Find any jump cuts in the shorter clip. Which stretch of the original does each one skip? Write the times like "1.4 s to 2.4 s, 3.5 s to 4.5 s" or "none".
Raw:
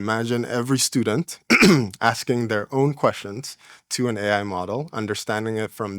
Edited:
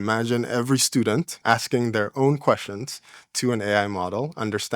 1.4 s to 1.9 s